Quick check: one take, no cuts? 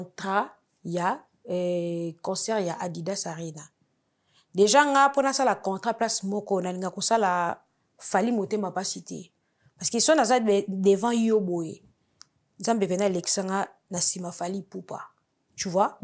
yes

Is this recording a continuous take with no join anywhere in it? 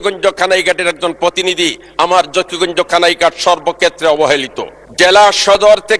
yes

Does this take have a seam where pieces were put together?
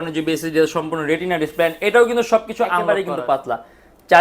yes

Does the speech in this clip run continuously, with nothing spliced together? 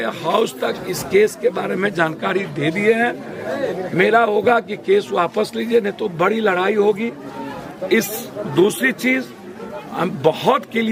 yes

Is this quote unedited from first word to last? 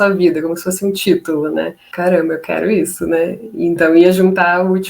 no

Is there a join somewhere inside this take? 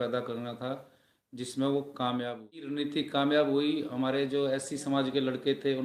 yes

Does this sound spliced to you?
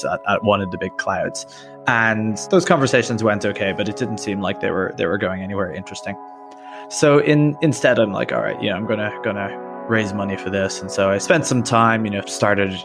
no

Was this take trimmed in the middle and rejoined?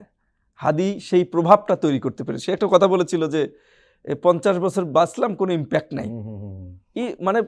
no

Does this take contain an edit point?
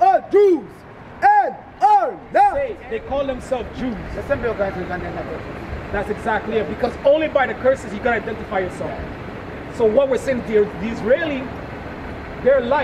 yes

